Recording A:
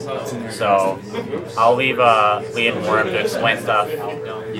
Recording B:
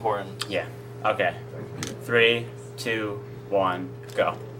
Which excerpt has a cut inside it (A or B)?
A